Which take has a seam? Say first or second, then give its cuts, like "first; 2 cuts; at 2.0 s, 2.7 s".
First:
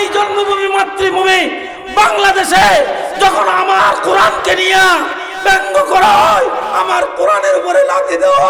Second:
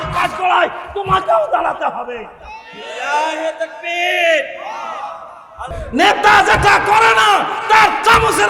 second; 1 cut; at 5.8 s